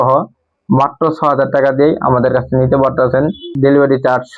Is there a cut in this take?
yes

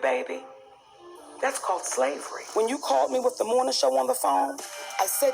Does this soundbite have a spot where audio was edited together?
yes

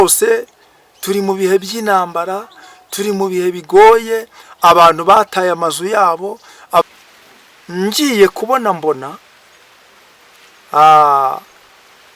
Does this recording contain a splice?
yes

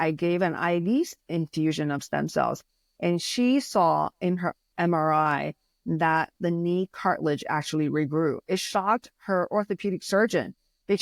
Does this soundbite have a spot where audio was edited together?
no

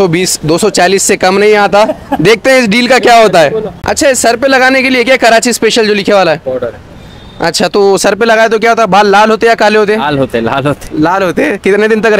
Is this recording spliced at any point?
yes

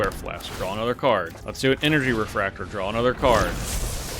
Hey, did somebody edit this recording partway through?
yes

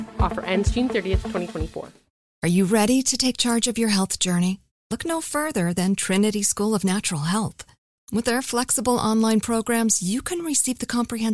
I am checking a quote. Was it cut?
yes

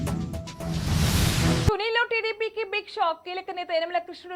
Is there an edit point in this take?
yes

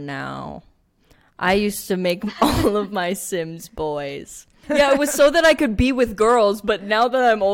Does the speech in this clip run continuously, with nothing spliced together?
no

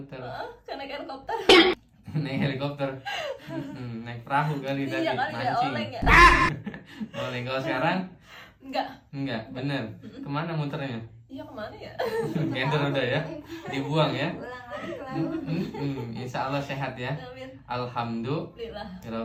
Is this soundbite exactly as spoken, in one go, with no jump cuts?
yes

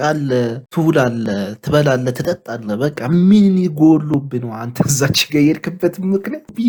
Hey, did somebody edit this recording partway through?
no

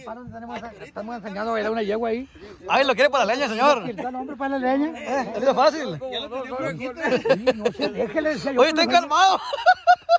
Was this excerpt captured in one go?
yes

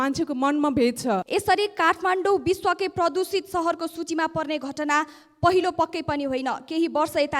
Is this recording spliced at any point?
yes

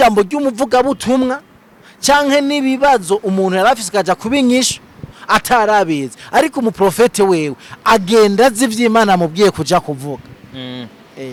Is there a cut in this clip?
no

